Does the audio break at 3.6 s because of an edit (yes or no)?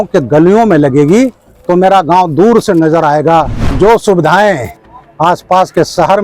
yes